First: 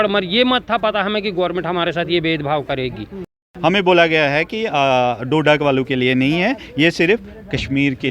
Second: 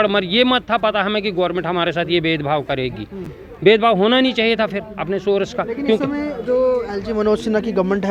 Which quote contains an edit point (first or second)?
first